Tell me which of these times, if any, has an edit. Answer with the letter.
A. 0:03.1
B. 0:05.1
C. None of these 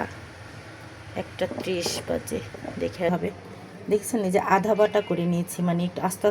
A